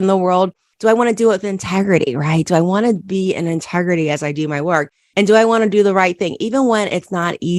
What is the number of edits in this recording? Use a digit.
0